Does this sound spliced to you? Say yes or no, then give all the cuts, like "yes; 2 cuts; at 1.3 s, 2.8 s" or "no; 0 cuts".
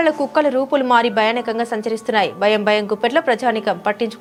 no; 0 cuts